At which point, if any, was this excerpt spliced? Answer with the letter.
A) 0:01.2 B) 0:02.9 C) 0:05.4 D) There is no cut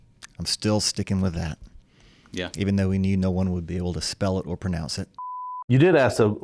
C